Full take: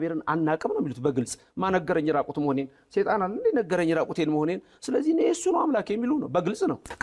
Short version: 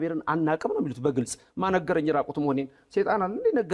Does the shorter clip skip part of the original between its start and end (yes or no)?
no